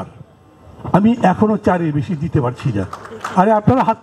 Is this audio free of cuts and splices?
yes; 0 cuts

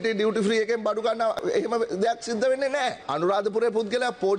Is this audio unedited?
no; 2 cuts; at 1.4 s, 3.1 s

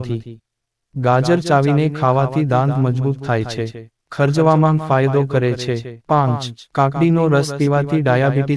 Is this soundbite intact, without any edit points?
no; 1 cut; at 6.1 s

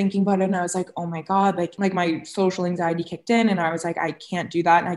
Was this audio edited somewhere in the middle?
yes; 1 cut; at 1.7 s

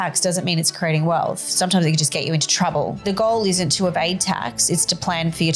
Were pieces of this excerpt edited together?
yes; 1 cut; at 3.0 s

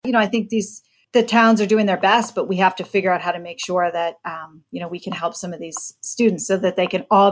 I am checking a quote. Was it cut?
yes; 1 cut; at 0.9 s

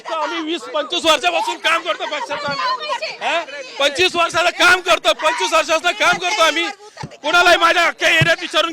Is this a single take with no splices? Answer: yes; 0 cuts

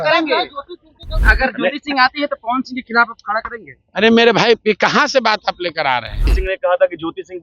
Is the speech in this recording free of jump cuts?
no; 2 cuts; at 1.2 s, 6.3 s

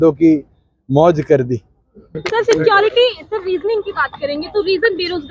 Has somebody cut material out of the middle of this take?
yes; 1 cut; at 2.2 s

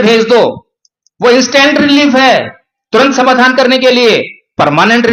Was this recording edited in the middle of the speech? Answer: no; 0 cuts

